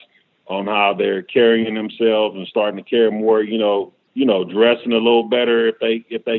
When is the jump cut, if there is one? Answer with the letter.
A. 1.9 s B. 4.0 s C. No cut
B